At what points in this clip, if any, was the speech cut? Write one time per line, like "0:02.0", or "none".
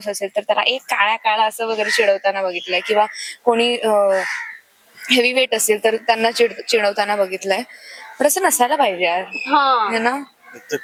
none